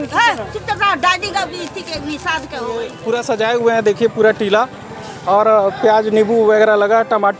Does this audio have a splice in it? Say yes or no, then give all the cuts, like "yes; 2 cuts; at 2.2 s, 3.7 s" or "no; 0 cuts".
yes; 1 cut; at 2.9 s